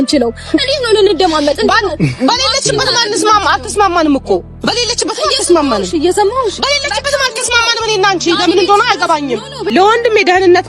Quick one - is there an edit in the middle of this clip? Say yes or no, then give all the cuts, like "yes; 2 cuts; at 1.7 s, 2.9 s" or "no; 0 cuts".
yes; 1 cut; at 9.6 s